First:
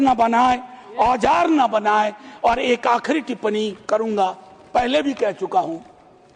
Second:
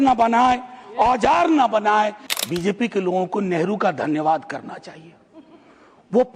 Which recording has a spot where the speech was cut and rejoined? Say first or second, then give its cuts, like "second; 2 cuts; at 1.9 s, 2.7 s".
second; 1 cut; at 2.2 s